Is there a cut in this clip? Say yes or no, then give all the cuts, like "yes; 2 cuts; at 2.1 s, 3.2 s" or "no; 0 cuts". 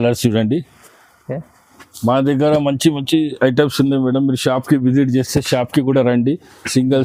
no; 0 cuts